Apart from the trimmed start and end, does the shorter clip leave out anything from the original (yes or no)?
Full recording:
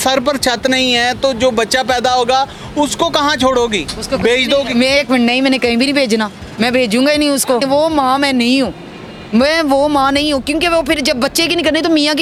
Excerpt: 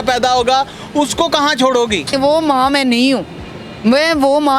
yes